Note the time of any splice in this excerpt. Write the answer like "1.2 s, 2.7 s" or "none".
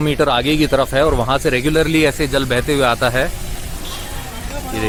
none